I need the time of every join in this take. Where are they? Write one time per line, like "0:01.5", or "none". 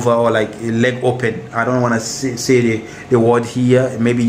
none

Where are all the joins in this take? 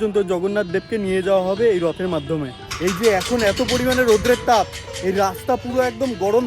0:02.5

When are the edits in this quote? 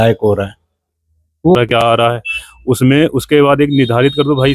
0:01.5

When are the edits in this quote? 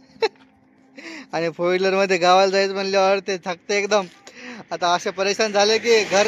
none

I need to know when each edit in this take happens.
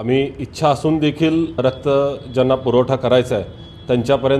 0:01.6

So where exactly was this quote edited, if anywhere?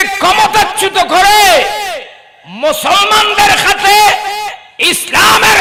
none

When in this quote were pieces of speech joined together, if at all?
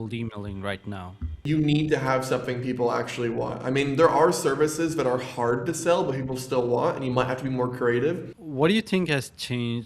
0:01.4
0:08.4

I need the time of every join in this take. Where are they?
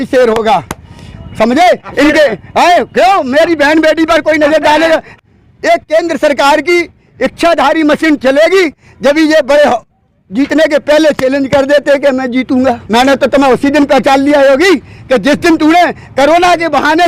0:05.1
0:12.8

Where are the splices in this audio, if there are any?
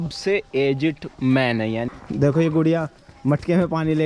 0:01.9

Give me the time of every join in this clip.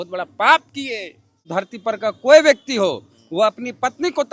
0:01.4

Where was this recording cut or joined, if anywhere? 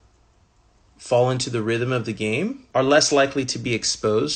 0:02.6

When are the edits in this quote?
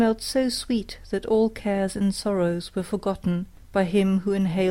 0:02.7

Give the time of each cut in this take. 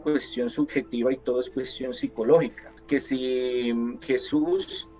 0:02.7

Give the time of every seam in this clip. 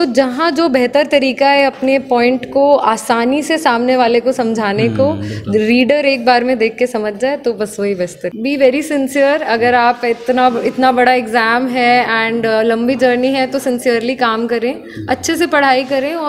0:08.3

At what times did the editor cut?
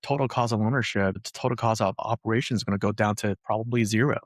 0:01.3

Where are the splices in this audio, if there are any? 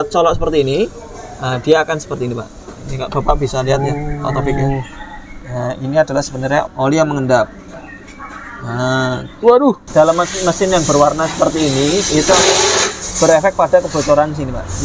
0:06.7
0:09.8

